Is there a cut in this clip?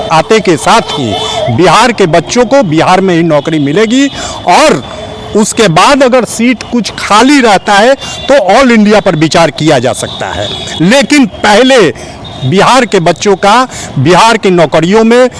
no; 0 cuts

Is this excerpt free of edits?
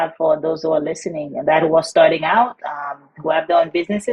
yes; 0 cuts

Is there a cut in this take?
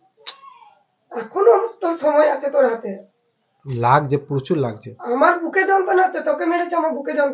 no; 0 cuts

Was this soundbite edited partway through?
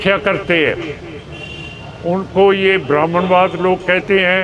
no; 0 cuts

